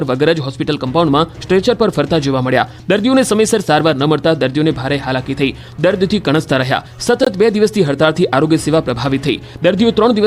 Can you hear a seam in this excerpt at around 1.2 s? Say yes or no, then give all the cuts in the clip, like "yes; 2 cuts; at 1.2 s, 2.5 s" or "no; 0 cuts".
yes; 1 cut; at 1.2 s